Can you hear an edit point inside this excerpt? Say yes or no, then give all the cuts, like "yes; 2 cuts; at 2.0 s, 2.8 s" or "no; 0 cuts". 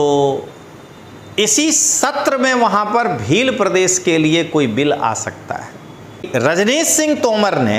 yes; 1 cut; at 6.3 s